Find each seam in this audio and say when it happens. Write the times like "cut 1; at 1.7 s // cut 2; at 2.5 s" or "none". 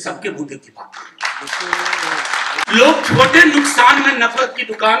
cut 1; at 2.7 s